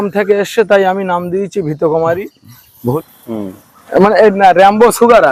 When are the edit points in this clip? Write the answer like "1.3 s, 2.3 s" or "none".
2.8 s